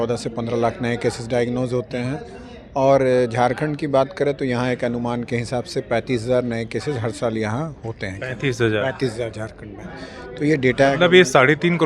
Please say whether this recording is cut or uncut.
uncut